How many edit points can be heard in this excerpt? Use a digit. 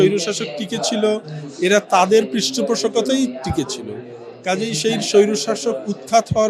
0